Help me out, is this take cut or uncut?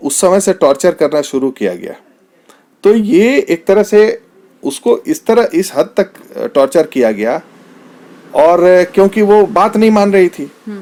uncut